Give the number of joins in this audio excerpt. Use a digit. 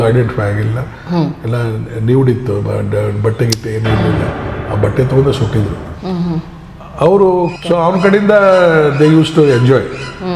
1